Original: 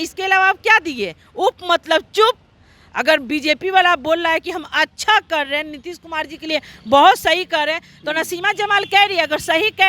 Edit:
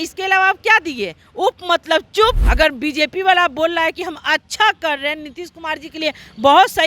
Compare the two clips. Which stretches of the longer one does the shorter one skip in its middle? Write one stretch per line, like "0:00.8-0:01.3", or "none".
0:02.4-0:02.9